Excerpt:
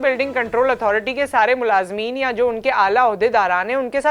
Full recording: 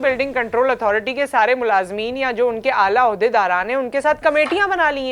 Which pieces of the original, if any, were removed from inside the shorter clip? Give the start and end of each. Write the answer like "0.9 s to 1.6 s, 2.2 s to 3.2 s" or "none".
none